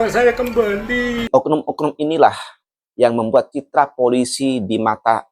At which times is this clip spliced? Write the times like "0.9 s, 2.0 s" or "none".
1.3 s